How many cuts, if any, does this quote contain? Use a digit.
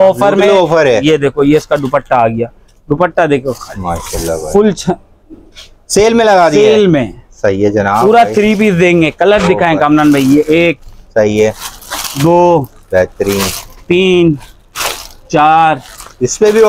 0